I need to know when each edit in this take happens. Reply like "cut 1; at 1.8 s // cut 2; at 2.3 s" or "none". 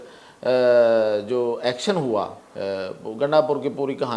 cut 1; at 2.4 s